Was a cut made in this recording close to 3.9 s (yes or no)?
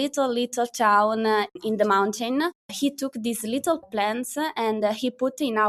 yes